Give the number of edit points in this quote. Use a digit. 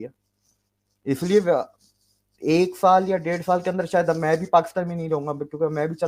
0